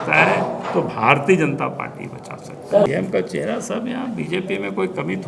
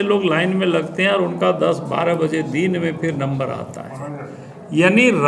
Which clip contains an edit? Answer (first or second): first